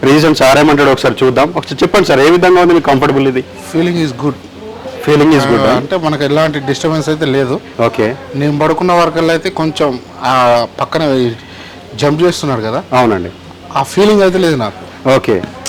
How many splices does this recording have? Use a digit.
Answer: 0